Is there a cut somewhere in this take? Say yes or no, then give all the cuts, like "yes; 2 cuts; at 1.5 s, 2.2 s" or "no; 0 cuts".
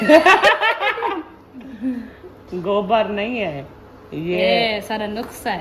no; 0 cuts